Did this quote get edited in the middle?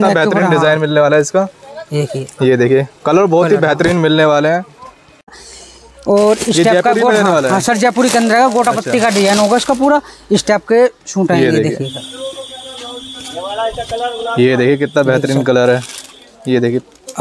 no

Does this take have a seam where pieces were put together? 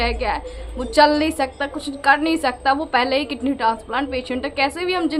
no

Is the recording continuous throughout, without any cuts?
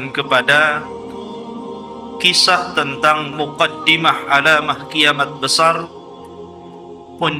yes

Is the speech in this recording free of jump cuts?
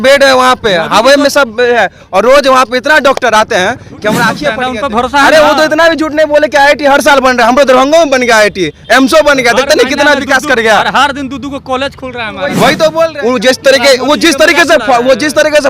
no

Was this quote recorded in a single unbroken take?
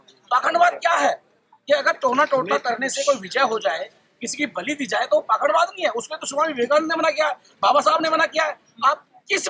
yes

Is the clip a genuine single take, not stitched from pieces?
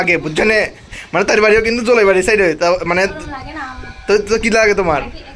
yes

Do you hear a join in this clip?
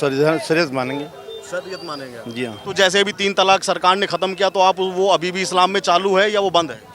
yes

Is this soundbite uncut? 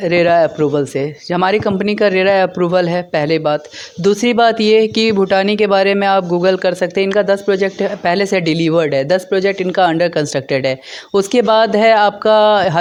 yes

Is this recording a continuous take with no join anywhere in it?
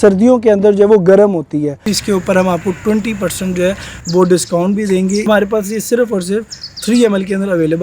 no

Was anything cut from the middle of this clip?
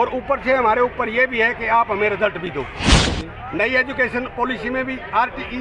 yes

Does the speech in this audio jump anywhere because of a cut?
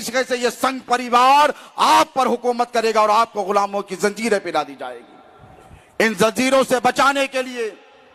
no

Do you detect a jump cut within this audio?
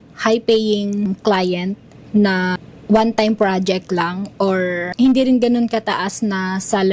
yes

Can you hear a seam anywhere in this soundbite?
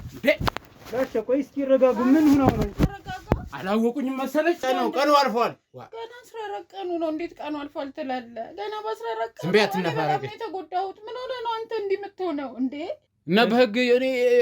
yes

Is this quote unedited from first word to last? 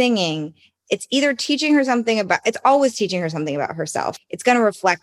yes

